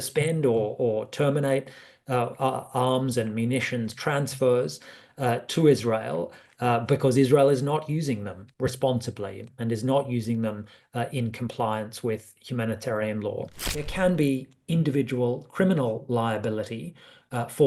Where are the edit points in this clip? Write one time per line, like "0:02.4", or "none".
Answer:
0:13.9